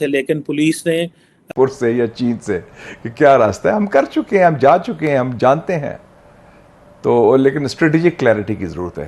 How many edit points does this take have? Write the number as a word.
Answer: one